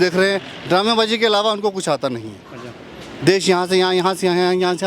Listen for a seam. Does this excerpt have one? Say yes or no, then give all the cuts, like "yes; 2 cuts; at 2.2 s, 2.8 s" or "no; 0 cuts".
no; 0 cuts